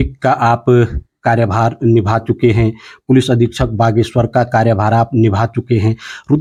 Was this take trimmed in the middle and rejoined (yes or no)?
no